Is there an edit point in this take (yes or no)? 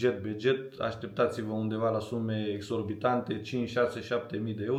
no